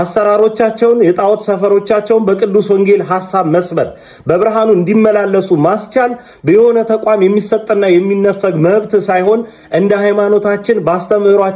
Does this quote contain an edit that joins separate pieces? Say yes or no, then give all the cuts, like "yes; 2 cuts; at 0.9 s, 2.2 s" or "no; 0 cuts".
no; 0 cuts